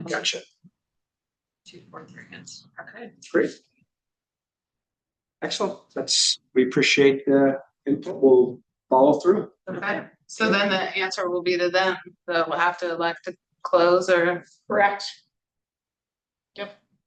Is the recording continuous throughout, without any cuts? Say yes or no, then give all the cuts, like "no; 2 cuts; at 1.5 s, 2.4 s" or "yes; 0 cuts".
yes; 0 cuts